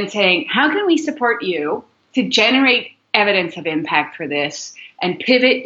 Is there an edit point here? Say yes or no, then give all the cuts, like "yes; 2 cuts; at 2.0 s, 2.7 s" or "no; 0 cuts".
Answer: no; 0 cuts